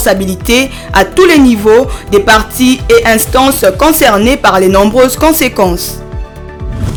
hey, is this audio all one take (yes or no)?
yes